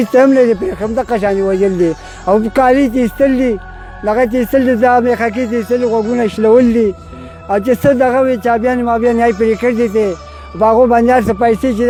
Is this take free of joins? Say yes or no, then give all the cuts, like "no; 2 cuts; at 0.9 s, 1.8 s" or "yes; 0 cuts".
yes; 0 cuts